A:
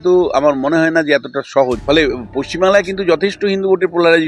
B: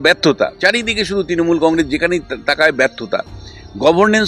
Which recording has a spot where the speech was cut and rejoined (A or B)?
A